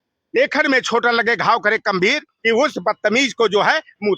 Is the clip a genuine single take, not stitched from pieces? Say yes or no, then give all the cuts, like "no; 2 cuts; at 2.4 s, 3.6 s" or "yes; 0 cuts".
no; 1 cut; at 2.3 s